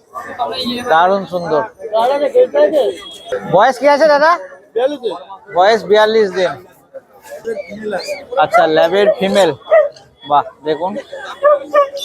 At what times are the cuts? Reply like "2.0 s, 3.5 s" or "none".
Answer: 7.4 s